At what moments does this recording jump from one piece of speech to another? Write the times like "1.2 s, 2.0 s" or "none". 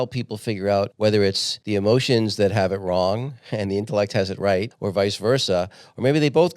0.9 s, 1.5 s, 4.8 s